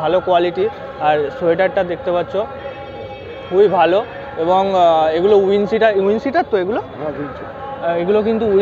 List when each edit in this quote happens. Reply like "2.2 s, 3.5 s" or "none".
none